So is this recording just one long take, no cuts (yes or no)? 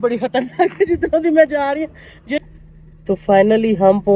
no